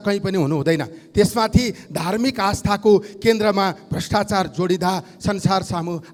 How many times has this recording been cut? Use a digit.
0